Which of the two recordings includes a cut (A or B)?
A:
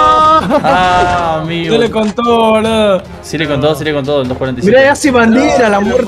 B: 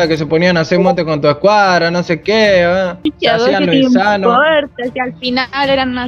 B